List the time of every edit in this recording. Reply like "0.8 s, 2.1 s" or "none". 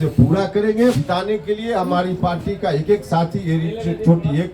1.0 s